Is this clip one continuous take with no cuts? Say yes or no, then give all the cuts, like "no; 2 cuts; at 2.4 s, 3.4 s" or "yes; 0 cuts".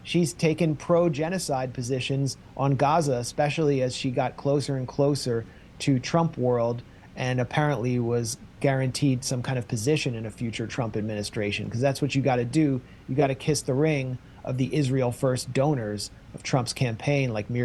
yes; 0 cuts